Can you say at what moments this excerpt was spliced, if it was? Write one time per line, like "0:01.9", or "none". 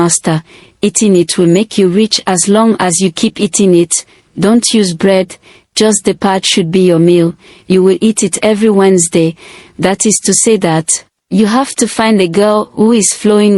none